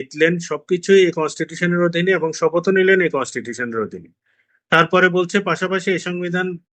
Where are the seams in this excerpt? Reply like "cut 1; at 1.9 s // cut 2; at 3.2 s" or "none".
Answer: none